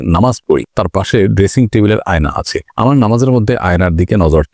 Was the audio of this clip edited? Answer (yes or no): no